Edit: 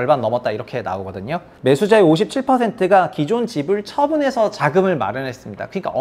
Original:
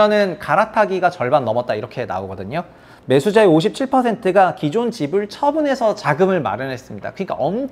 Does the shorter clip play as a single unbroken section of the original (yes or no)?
no